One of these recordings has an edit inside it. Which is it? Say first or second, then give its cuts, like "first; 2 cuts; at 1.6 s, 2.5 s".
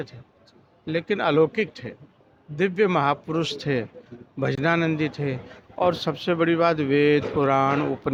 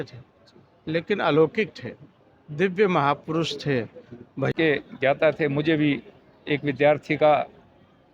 second; 1 cut; at 4.5 s